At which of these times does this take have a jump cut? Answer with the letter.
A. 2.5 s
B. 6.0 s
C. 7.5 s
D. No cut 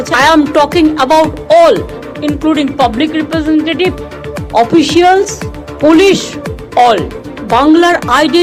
D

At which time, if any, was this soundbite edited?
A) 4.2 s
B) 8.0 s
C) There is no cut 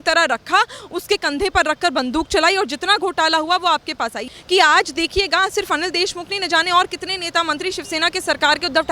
A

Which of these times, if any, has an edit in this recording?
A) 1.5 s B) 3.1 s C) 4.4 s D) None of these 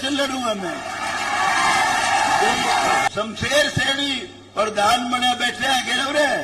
B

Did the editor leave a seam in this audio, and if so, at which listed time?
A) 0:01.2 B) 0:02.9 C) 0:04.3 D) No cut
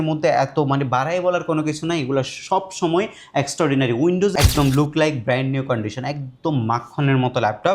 C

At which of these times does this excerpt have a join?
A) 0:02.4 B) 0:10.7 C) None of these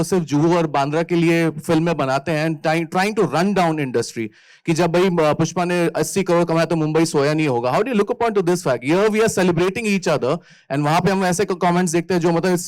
C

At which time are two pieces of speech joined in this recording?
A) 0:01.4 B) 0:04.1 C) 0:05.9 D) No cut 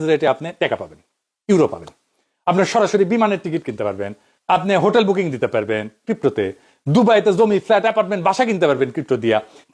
D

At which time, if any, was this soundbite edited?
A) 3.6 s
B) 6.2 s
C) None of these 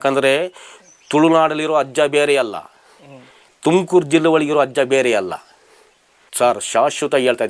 B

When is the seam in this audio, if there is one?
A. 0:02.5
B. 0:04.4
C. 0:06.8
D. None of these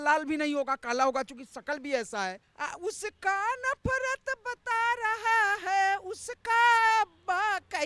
A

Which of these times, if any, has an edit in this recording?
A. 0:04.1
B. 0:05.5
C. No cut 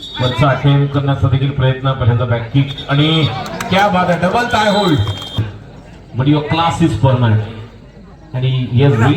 B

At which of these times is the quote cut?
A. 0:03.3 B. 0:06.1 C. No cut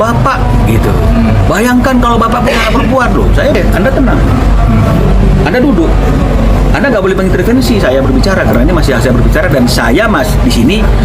C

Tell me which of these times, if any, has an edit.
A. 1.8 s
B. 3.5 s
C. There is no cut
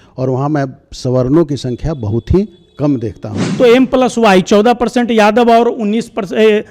B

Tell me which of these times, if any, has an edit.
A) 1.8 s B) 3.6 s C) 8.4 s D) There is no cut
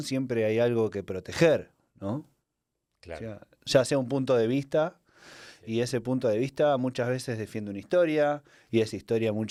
D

